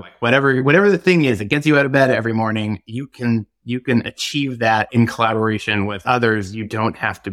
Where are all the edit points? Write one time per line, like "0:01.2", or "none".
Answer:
0:04.9
0:06.0